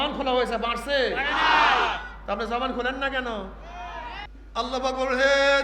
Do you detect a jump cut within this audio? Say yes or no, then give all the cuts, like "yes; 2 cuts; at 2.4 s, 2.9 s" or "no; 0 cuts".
yes; 1 cut; at 4.3 s